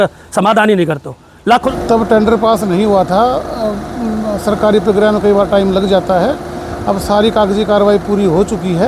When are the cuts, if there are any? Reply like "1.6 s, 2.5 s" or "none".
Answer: 1.7 s